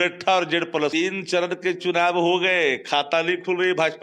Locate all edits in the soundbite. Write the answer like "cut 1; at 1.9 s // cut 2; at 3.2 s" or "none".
cut 1; at 0.9 s